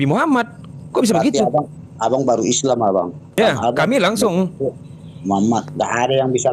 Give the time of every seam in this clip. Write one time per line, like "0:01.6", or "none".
0:03.4